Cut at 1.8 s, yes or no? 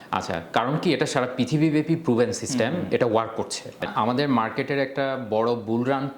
no